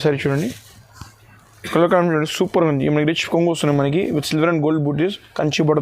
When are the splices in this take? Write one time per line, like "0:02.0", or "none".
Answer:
none